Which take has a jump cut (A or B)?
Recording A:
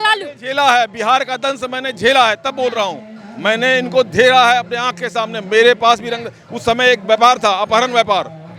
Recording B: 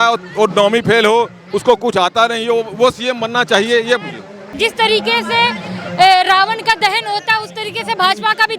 B